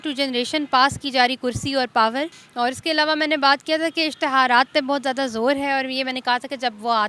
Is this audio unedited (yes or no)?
no